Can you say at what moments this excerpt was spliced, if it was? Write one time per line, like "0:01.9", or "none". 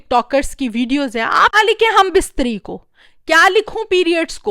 0:01.5